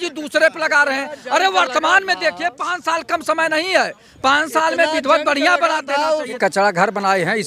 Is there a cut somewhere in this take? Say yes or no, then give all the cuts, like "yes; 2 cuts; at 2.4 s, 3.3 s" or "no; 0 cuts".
yes; 1 cut; at 6.4 s